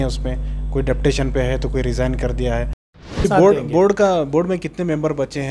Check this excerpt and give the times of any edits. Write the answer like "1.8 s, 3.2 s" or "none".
3.2 s

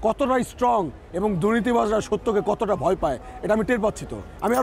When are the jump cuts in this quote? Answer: none

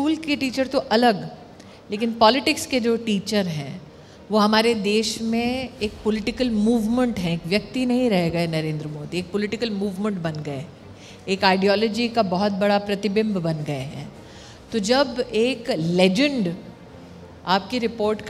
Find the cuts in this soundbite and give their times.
none

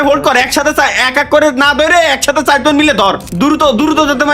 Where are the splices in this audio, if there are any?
3.3 s

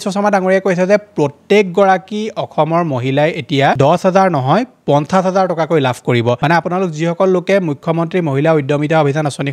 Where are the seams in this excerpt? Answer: none

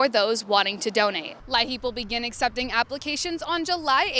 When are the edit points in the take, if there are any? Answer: 1.3 s

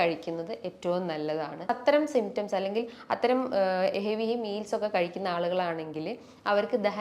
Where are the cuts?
1.7 s

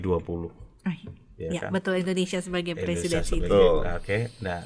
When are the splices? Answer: none

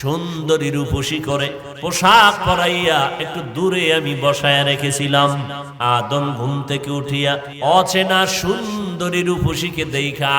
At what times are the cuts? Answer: 1.7 s, 5.6 s, 7.5 s

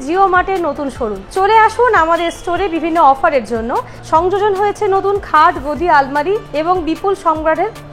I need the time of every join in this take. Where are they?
3.9 s, 6.5 s

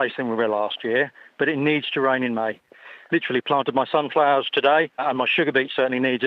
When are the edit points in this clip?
2.9 s, 5.0 s

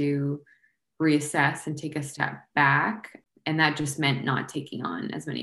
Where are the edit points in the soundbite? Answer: 3.2 s

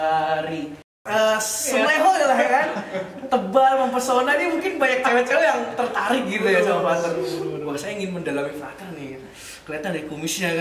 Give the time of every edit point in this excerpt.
0.9 s

